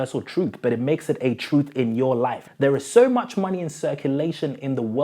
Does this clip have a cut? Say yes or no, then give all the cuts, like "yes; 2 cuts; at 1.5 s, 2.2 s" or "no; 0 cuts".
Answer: yes; 1 cut; at 2.4 s